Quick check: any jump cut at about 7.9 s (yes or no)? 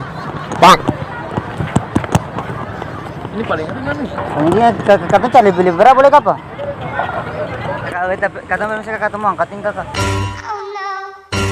yes